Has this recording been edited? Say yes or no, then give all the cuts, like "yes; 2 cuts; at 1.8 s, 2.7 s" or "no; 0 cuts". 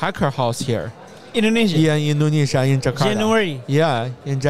no; 0 cuts